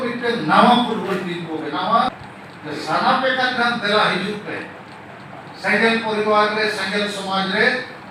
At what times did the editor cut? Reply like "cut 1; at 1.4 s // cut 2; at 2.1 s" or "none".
cut 1; at 2.1 s